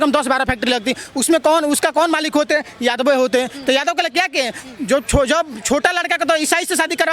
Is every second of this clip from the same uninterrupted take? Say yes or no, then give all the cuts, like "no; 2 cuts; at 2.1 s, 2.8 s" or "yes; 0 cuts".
yes; 0 cuts